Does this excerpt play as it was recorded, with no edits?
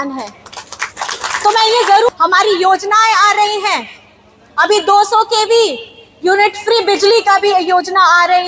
no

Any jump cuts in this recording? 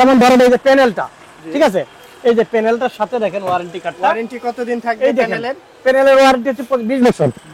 no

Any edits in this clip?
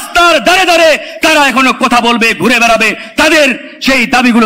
no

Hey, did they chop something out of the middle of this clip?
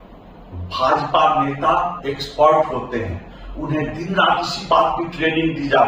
no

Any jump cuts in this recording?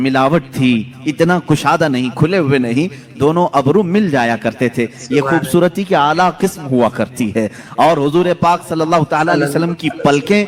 no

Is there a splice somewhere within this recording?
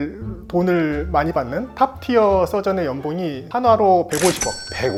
no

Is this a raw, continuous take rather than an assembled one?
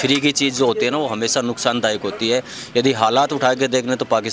yes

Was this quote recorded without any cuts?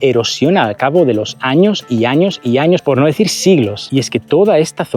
yes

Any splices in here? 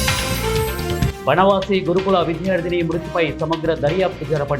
no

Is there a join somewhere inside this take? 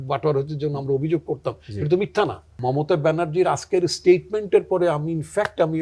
yes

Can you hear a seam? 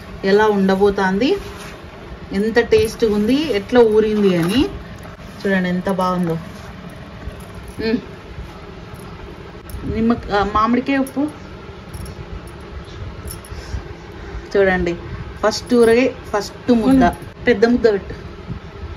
no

